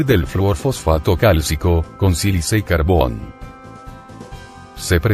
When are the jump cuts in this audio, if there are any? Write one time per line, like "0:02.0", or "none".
0:02.6